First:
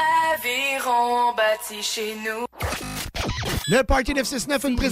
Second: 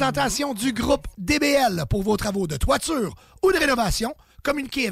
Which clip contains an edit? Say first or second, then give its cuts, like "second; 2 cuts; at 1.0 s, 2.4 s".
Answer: first; 1 cut; at 2.4 s